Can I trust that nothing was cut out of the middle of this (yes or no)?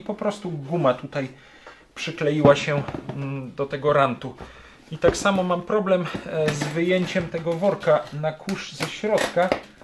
yes